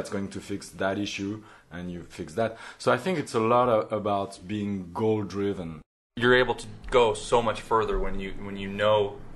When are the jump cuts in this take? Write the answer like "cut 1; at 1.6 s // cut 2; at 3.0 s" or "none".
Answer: cut 1; at 6.0 s